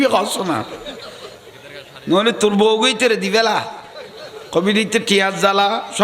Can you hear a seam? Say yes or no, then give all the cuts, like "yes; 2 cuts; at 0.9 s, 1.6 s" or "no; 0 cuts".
no; 0 cuts